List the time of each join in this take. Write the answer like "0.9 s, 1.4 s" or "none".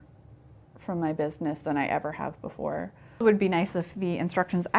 3.0 s